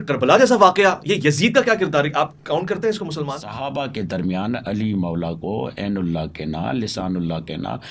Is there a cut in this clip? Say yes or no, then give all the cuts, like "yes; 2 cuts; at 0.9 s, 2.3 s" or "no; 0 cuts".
yes; 1 cut; at 3.5 s